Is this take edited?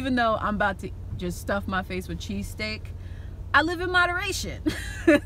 no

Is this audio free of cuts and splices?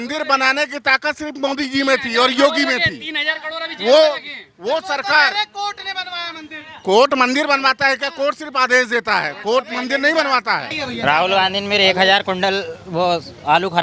no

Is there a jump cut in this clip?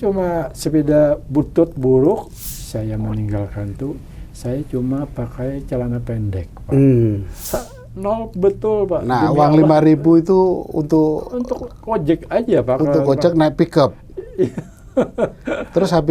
yes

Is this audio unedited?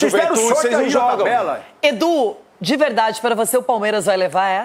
yes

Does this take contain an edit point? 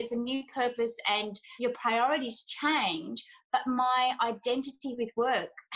no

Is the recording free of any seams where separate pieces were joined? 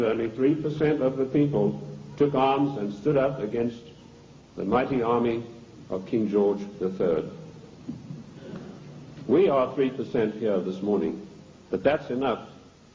no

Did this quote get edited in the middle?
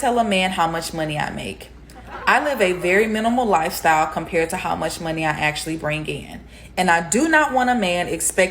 yes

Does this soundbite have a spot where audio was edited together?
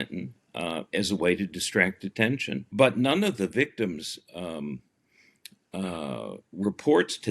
yes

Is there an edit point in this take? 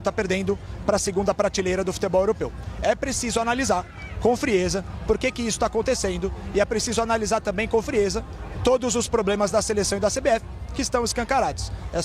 no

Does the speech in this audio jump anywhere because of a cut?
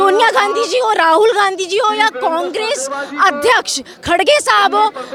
no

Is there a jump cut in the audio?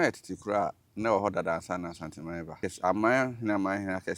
yes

